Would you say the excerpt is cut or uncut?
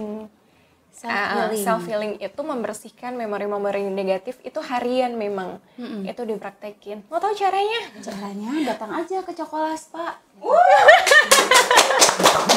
uncut